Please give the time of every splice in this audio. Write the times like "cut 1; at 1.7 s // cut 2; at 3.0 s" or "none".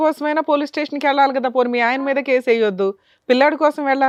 none

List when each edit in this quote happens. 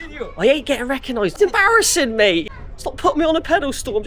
cut 1; at 1.3 s // cut 2; at 2.5 s

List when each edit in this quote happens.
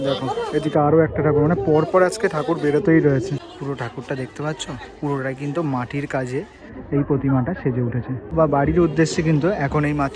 cut 1; at 3.5 s // cut 2; at 8.3 s

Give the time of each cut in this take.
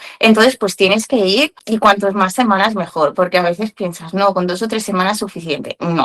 cut 1; at 1.6 s

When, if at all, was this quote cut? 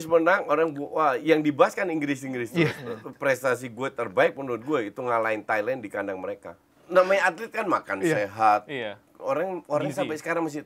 cut 1; at 6.7 s

